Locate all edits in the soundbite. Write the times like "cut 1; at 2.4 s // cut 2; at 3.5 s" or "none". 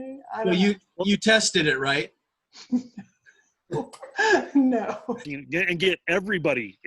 cut 1; at 5.2 s